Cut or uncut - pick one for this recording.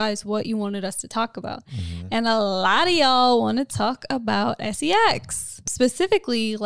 cut